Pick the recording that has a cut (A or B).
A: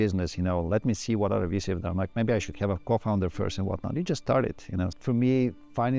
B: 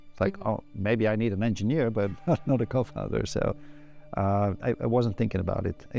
A